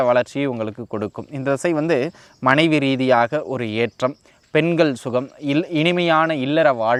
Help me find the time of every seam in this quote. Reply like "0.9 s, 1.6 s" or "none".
none